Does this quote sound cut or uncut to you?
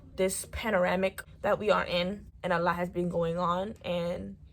cut